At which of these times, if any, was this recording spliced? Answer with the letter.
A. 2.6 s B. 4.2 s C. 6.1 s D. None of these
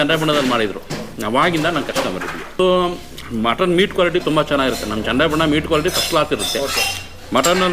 A